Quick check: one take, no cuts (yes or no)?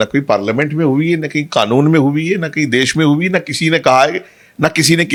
yes